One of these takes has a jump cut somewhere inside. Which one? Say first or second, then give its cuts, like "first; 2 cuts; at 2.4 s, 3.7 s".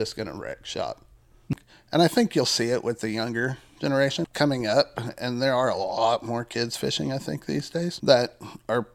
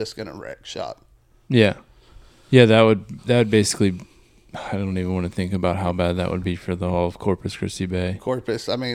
first; 3 cuts; at 1.5 s, 4.2 s, 8.0 s